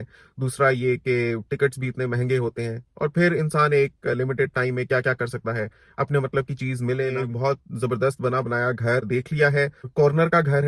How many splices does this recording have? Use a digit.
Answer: 1